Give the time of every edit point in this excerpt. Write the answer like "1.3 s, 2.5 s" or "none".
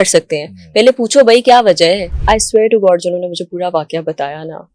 2.1 s